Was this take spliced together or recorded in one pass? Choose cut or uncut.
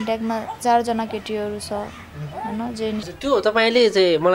cut